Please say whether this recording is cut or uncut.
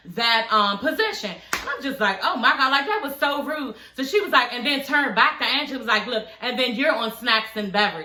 uncut